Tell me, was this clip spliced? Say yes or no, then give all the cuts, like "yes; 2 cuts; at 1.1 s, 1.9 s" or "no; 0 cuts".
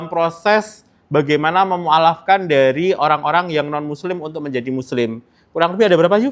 no; 0 cuts